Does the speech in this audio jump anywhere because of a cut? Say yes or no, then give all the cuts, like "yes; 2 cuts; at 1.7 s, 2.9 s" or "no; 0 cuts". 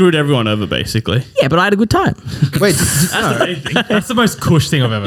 no; 0 cuts